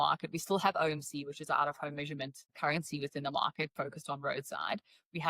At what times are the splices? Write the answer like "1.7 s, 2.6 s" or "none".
2.5 s